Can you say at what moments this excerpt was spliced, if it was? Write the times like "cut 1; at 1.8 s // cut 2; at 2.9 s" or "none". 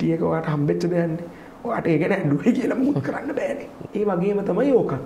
cut 1; at 3.8 s